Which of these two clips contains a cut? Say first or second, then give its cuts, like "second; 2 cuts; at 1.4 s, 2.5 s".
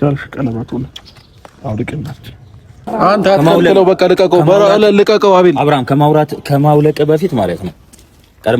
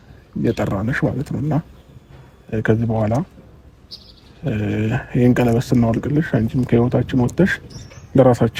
first; 1 cut; at 2.9 s